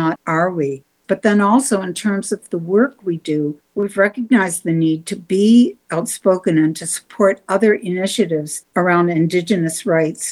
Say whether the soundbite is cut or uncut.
cut